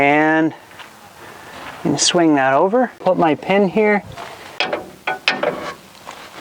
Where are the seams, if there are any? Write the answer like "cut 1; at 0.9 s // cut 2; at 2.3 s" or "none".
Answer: cut 1; at 3.0 s // cut 2; at 4.3 s

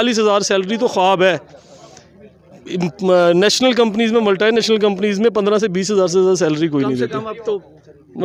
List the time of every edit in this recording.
none

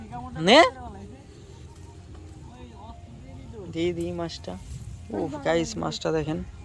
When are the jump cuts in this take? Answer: none

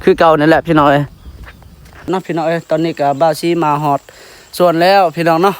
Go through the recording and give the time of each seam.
cut 1; at 2.1 s

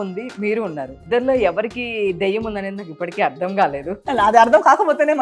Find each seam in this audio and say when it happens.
cut 1; at 1.0 s // cut 2; at 4.0 s

